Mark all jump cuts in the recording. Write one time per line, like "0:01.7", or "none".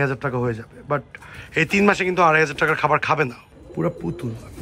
0:03.4

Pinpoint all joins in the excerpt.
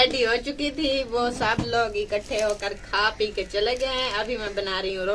none

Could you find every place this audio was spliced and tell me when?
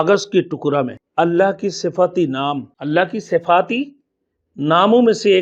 0:01.0
0:02.7

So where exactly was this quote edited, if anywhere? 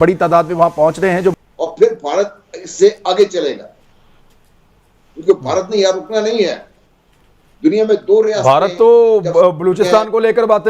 0:01.4

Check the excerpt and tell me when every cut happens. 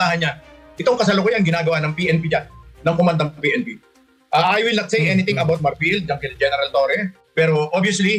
0:07.1

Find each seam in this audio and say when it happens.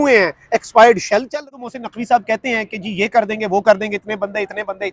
0:01.5

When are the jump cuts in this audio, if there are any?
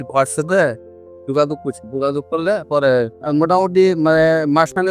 0:03.2

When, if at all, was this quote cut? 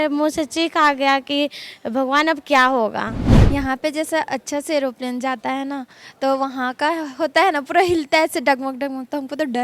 0:03.3

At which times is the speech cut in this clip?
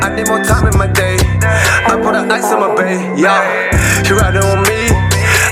none

